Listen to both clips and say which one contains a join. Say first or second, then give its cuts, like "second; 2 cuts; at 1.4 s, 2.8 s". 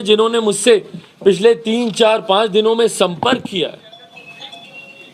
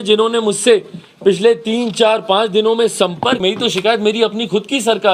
second; 1 cut; at 3.4 s